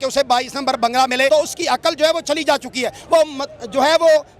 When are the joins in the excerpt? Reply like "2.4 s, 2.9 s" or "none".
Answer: 1.3 s